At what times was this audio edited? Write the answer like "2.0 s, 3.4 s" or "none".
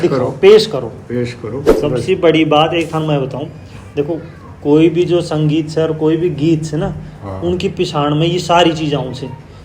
1.7 s